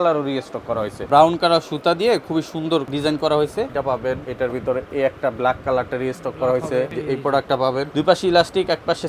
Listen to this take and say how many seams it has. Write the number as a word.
five